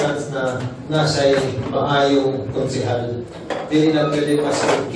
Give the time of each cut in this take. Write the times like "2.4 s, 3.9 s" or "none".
1.4 s

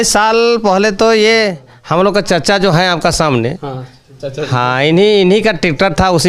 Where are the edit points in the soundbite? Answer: none

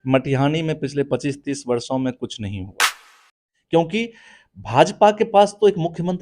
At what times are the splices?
3.0 s

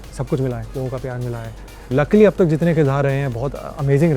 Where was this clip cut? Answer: 1.9 s

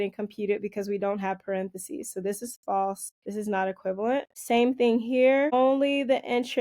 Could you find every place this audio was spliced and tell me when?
3.1 s, 4.3 s, 5.5 s

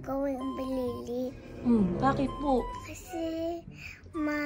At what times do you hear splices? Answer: 2.8 s

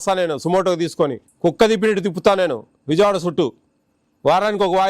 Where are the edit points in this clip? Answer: 1.2 s

